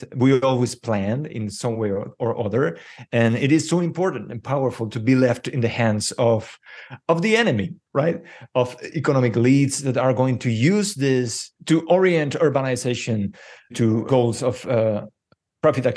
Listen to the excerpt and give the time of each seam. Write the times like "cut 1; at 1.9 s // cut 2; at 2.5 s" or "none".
cut 1; at 11.5 s // cut 2; at 13.8 s